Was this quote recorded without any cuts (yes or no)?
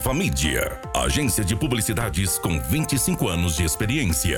yes